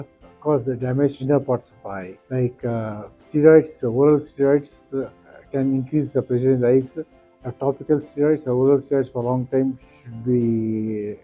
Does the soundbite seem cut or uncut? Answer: uncut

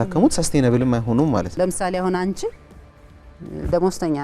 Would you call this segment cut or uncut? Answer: cut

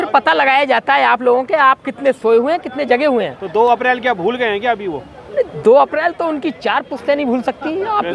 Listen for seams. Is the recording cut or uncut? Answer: uncut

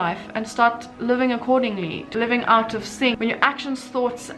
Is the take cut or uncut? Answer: uncut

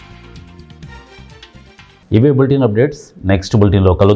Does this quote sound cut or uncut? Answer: uncut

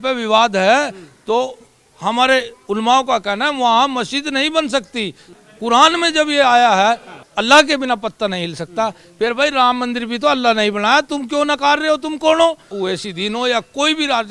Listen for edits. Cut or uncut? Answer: cut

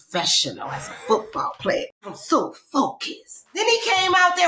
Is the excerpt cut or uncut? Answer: cut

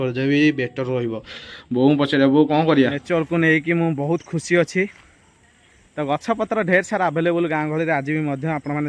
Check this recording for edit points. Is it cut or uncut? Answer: cut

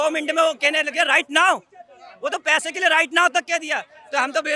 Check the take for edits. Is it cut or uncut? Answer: uncut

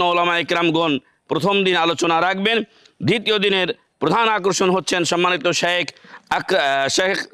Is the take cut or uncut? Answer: uncut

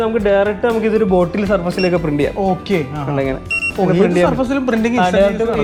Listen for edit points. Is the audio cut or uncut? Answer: uncut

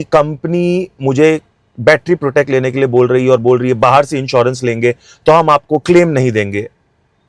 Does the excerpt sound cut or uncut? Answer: uncut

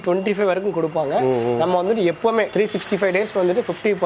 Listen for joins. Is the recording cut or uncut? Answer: uncut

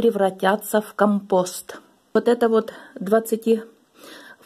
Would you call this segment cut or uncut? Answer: cut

